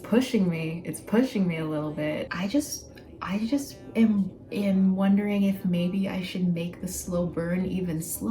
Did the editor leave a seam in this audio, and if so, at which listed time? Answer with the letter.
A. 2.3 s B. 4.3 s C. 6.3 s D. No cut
A